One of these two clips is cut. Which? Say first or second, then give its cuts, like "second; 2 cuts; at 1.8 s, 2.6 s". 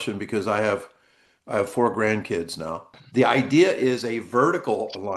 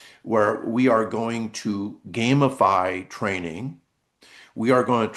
first; 1 cut; at 3.0 s